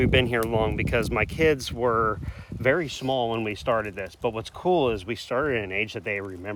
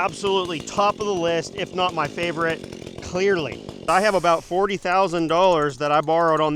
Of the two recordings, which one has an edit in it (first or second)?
second